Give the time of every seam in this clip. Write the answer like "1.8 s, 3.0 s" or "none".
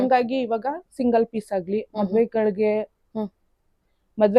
none